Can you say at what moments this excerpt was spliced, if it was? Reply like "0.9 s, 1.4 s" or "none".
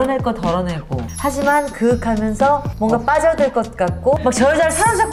4.2 s